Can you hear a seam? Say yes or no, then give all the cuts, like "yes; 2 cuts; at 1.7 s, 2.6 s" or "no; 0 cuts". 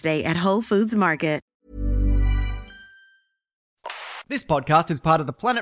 yes; 2 cuts; at 1.5 s, 3.7 s